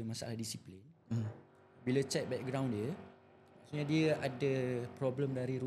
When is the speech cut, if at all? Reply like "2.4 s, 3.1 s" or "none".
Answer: none